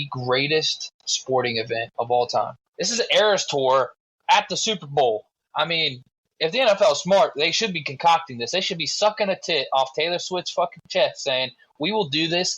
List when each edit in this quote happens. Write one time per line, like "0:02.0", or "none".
0:01.9
0:02.6